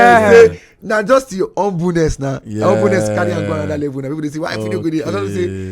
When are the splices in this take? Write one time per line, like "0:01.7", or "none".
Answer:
none